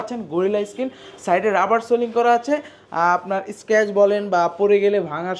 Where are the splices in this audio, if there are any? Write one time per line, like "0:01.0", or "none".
none